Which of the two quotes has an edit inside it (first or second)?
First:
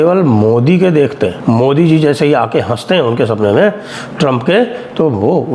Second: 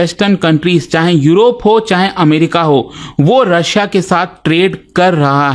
first